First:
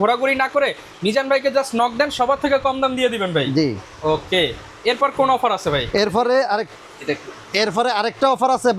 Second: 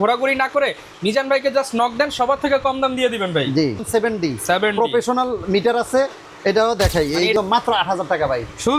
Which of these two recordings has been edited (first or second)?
second